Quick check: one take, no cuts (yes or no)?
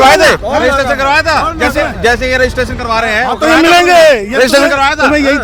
yes